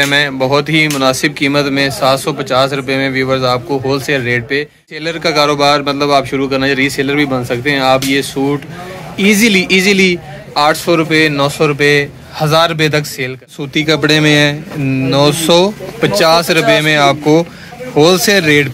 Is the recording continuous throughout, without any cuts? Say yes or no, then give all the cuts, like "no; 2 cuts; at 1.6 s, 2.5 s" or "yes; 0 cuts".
no; 2 cuts; at 5.0 s, 13.6 s